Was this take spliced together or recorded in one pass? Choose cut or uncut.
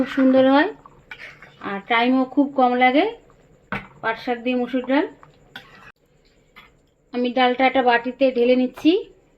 cut